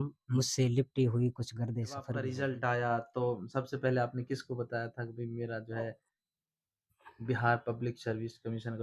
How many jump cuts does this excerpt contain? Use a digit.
1